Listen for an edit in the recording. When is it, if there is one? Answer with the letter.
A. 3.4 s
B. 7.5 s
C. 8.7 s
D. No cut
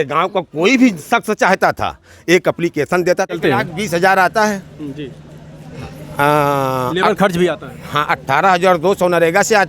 A